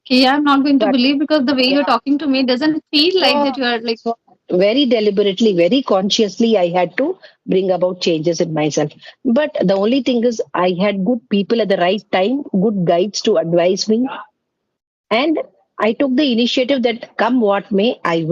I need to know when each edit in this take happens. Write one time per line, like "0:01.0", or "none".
none